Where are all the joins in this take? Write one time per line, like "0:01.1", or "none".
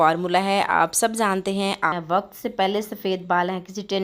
0:01.9